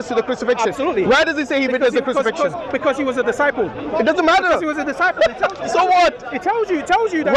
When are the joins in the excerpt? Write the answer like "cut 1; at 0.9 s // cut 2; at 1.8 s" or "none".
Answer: none